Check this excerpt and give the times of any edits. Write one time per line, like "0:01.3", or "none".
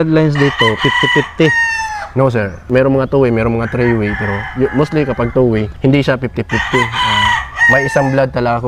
0:02.6
0:05.7